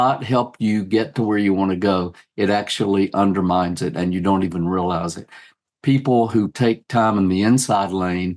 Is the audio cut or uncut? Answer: uncut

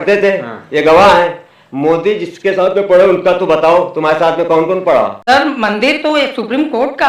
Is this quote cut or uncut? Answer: cut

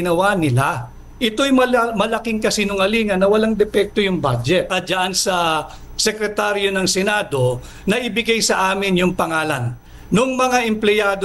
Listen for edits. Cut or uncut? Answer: cut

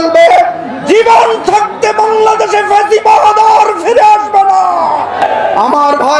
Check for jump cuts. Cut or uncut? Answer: cut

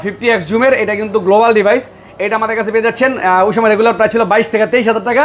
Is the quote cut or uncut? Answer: uncut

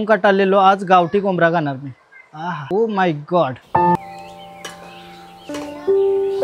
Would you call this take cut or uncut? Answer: cut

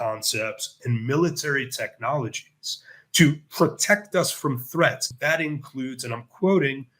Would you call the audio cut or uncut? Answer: cut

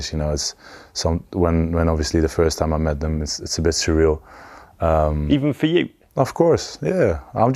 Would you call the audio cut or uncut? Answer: uncut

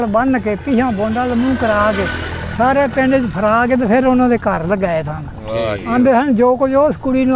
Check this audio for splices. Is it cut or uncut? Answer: uncut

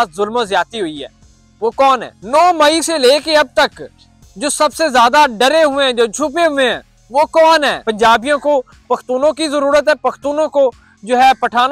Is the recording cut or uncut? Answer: cut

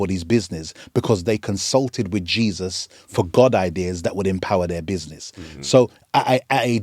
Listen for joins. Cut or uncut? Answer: uncut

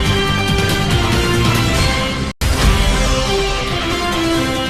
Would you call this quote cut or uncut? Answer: uncut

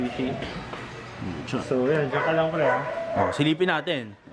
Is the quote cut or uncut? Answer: uncut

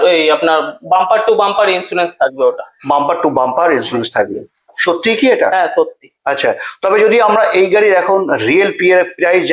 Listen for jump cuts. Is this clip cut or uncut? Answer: uncut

